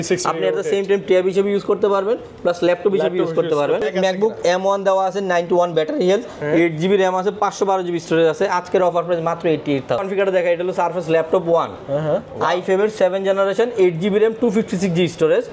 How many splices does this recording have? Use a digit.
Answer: 2